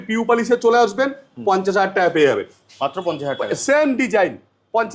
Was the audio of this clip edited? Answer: no; 0 cuts

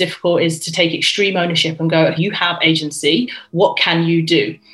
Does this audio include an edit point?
yes; 1 cut; at 2.2 s

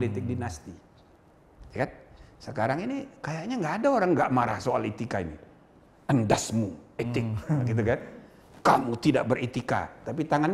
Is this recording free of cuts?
yes; 0 cuts

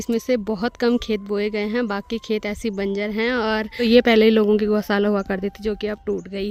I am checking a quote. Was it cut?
no; 0 cuts

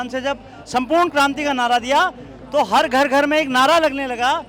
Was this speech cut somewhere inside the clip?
no; 0 cuts

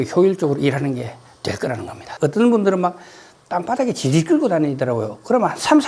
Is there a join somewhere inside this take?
yes; 1 cut; at 2.1 s

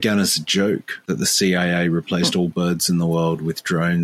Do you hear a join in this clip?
yes; 1 cut; at 0.9 s

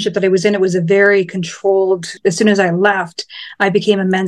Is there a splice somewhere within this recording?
yes; 1 cut; at 2.1 s

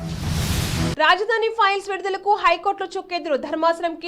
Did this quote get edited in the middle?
yes; 1 cut; at 0.9 s

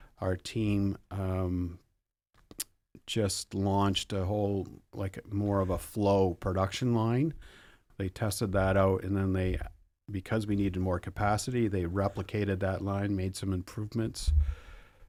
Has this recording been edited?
no; 0 cuts

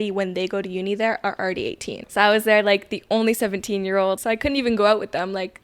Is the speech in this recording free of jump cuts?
no; 2 cuts; at 2.0 s, 4.2 s

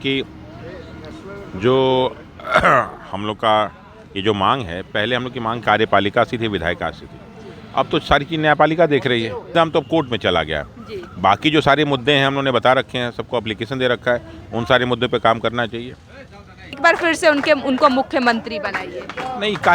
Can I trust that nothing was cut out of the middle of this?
no; 2 cuts; at 9.5 s, 16.7 s

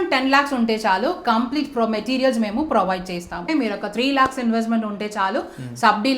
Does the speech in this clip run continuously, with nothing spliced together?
no; 1 cut; at 3.4 s

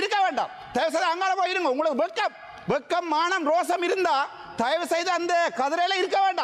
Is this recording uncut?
yes; 0 cuts

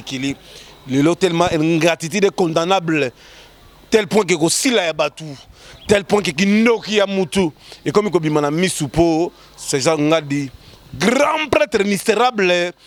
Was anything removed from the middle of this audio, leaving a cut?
no; 0 cuts

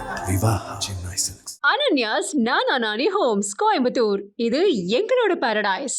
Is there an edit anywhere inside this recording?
no; 0 cuts

